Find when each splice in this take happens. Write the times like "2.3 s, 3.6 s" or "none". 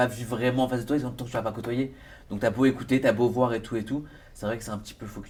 none

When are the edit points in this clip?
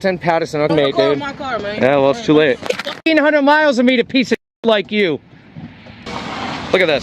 0.7 s, 3.1 s, 6.1 s

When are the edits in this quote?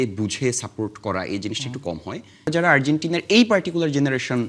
2.5 s

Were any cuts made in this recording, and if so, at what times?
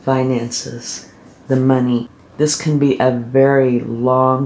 2.2 s

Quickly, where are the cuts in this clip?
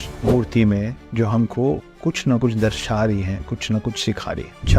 none

